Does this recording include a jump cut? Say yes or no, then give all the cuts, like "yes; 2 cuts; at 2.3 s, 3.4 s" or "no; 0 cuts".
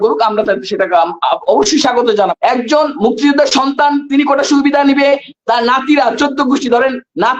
yes; 1 cut; at 2.3 s